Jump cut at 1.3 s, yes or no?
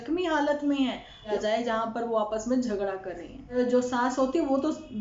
yes